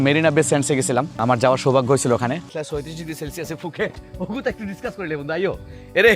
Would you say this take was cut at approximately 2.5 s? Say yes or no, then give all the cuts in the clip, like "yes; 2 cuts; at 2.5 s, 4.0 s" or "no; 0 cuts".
yes; 1 cut; at 2.5 s